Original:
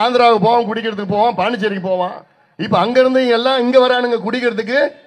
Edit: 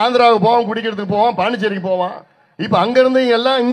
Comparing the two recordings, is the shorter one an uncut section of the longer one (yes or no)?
yes